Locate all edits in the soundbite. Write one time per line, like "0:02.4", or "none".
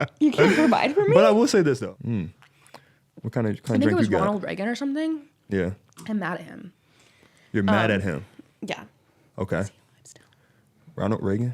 0:01.9